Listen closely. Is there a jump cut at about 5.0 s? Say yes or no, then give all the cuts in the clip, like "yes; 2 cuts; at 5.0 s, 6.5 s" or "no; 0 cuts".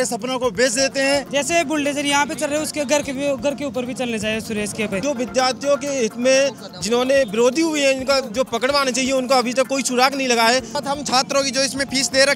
yes; 3 cuts; at 1.3 s, 5.0 s, 10.8 s